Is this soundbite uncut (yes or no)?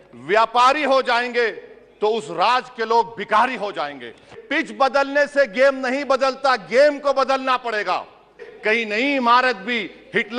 no